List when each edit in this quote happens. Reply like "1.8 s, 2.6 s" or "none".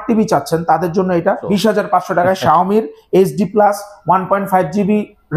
1.4 s

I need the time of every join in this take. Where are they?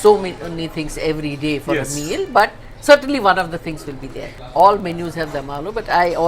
4.4 s

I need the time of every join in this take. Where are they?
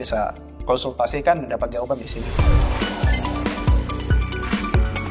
2.3 s

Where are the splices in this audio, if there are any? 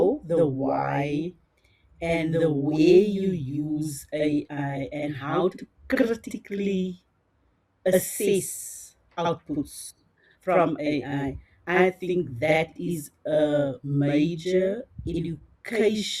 none

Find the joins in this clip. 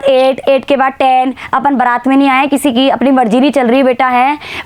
none

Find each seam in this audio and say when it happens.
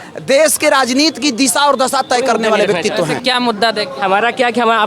3.1 s

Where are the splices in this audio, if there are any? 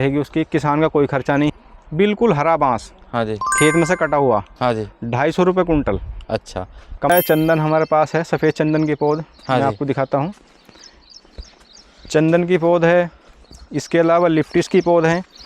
1.5 s, 7.1 s

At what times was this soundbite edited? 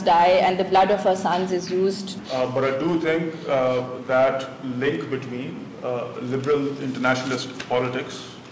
2.1 s

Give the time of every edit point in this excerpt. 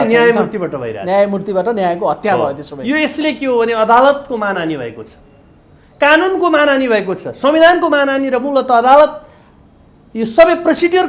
none

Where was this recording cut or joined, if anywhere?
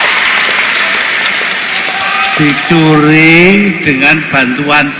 none

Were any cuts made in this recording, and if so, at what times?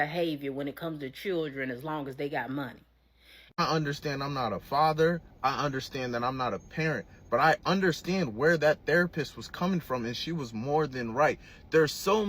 3.4 s

